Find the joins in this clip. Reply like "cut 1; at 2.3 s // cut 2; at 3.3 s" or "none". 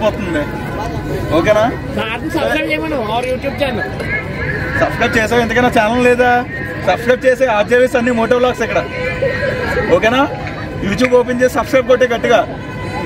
none